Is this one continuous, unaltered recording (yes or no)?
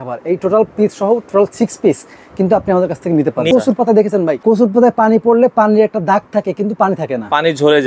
no